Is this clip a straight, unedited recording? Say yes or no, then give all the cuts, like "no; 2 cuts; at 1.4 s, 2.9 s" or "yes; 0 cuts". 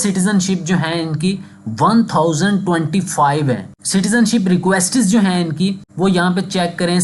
yes; 0 cuts